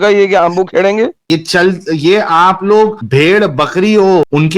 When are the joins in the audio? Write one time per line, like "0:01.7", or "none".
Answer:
0:01.2